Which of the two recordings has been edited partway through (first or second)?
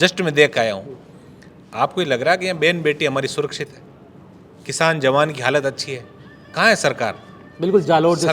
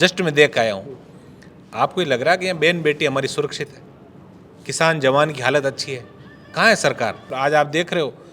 second